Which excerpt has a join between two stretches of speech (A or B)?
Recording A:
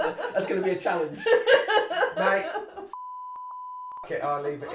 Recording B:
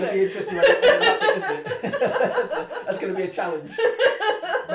A